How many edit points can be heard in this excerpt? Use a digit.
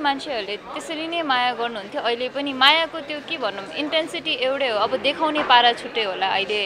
0